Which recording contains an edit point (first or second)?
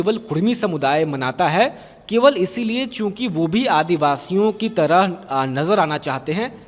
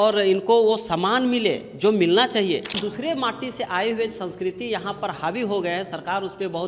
second